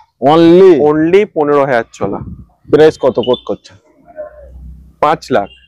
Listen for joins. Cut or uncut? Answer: uncut